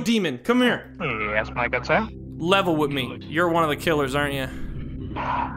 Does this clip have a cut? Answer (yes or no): yes